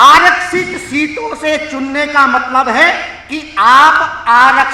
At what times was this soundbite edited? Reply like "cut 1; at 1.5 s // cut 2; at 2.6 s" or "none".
none